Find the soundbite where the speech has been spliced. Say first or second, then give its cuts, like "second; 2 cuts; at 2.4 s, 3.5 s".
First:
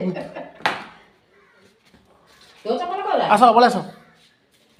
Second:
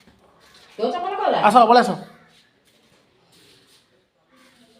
second; 1 cut; at 3.8 s